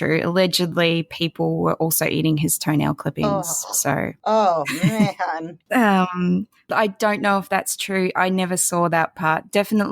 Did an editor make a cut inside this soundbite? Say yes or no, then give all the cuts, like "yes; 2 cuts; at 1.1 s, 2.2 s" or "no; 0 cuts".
yes; 3 cuts; at 4.2 s, 5.6 s, 6.6 s